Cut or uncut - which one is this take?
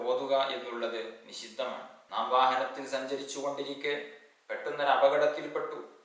cut